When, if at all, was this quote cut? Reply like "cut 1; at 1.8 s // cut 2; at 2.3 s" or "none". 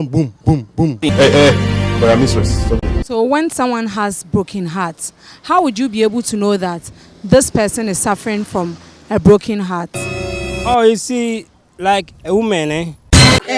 cut 1; at 0.9 s